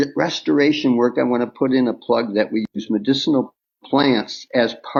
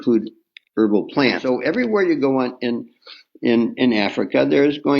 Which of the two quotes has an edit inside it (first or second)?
second